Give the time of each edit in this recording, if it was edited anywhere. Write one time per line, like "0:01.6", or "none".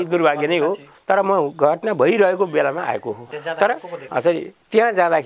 0:00.9
0:03.3
0:04.0